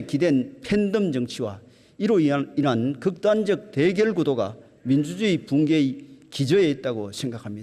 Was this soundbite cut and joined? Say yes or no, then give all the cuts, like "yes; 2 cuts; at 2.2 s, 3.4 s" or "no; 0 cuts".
no; 0 cuts